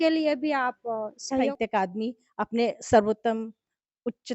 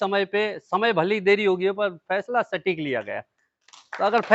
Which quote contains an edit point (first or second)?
first